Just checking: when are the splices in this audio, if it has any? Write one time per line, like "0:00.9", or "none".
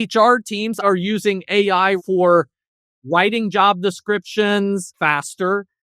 0:00.8
0:02.0
0:04.9

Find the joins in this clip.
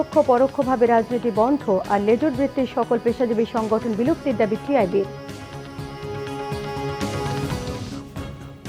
0:07.7

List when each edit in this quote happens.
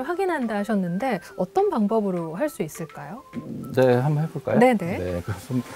none

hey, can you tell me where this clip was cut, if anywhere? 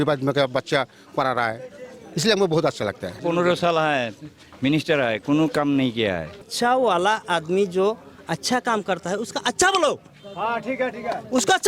0:03.2
0:06.4

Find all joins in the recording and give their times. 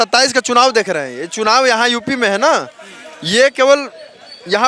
none

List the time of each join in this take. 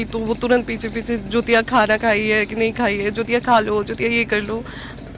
none

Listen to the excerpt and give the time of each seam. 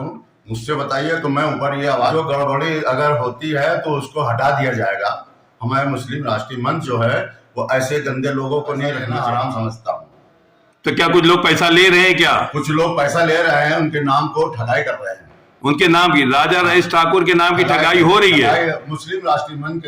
0:02.1
0:09.0

